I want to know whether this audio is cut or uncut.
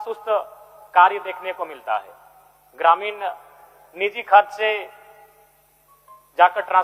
uncut